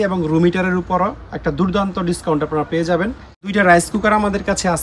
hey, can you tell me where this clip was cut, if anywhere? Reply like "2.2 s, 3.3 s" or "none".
3.3 s